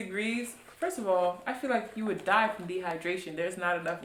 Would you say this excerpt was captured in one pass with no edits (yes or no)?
yes